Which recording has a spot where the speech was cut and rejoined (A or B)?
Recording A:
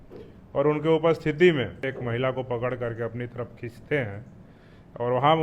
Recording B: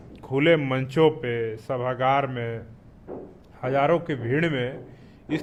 A